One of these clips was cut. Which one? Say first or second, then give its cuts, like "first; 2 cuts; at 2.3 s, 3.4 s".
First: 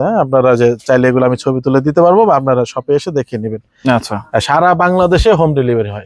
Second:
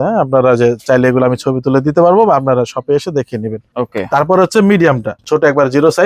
second; 2 cuts; at 3.7 s, 5.2 s